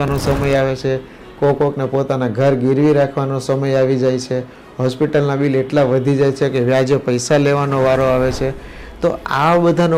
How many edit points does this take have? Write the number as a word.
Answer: zero